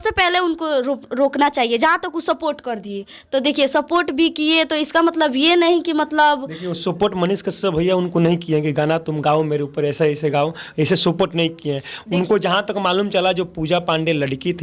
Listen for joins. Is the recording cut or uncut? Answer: uncut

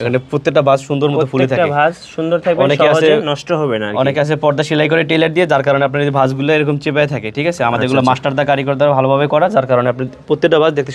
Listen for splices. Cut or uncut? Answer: uncut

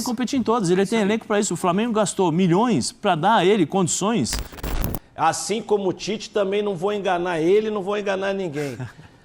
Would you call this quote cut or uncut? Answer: cut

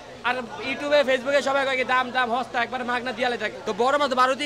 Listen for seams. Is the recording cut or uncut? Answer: cut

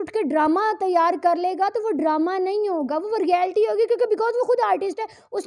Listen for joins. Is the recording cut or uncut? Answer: uncut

